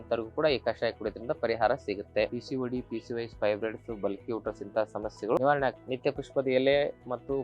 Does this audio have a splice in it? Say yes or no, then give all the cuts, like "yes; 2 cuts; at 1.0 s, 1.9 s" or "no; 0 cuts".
yes; 2 cuts; at 2.3 s, 5.9 s